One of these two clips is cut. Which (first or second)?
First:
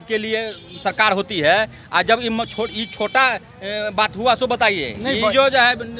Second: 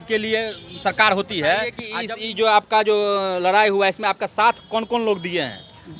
second